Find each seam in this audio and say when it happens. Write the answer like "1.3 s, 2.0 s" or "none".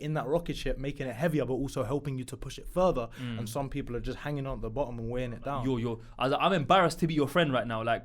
5.6 s